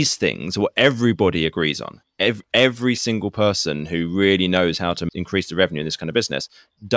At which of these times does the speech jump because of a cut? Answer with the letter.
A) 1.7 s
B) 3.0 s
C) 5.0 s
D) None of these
C